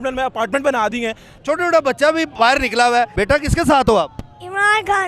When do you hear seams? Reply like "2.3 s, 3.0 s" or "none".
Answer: 1.3 s, 3.2 s